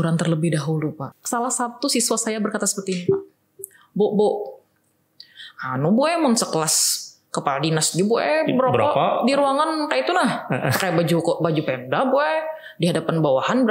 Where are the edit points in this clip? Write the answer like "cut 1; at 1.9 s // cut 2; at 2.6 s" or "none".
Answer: cut 1; at 1.1 s